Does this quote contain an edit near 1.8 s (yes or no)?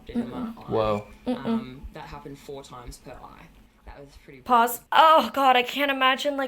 no